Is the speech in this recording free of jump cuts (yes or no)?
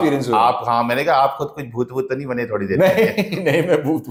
yes